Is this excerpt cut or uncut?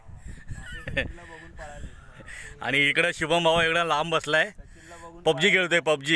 uncut